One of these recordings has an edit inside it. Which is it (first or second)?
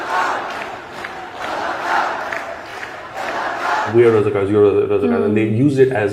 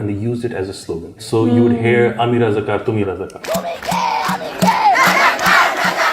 second